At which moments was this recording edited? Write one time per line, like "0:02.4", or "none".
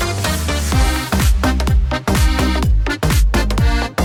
none